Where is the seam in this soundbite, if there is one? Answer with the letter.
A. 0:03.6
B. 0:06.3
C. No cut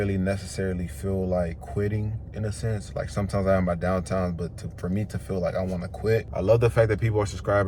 B